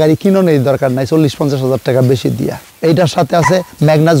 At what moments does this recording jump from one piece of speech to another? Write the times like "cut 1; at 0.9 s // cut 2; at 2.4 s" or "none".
cut 1; at 2.6 s